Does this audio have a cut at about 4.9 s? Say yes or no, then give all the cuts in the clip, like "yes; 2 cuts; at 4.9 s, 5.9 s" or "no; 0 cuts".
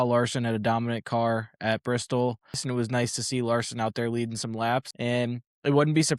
yes; 2 cuts; at 2.6 s, 4.9 s